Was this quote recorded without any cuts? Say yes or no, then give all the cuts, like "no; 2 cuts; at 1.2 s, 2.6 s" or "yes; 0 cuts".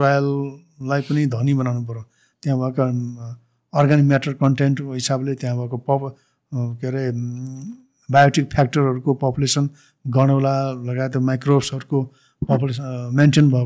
yes; 0 cuts